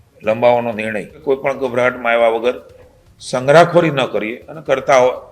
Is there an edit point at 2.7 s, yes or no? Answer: no